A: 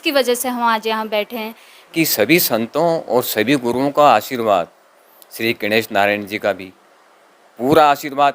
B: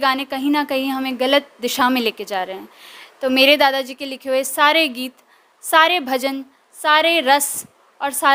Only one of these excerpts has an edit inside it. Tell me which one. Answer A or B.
A